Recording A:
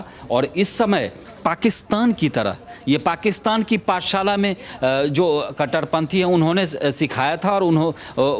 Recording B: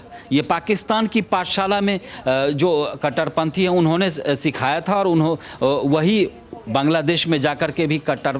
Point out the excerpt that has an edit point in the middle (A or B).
A